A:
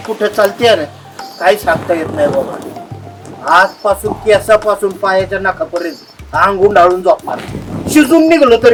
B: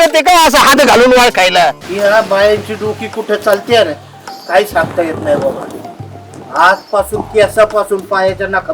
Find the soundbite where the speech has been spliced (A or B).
B